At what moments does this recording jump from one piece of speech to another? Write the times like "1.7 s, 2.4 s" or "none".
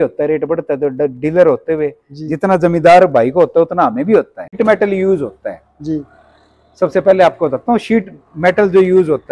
4.5 s